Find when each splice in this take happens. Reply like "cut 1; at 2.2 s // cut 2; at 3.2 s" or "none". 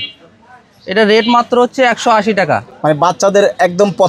none